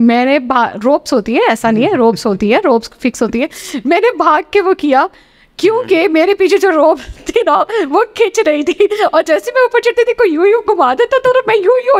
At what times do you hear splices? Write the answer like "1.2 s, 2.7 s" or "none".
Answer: none